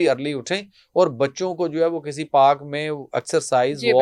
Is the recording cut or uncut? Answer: uncut